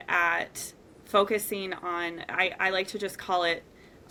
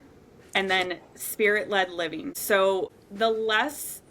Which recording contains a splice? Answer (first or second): second